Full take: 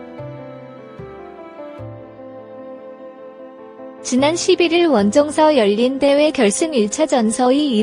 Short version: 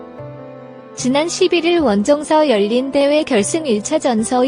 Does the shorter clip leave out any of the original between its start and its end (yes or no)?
yes